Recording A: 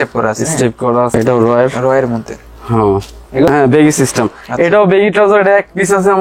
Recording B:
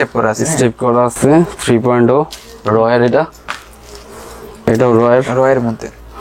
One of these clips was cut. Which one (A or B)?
A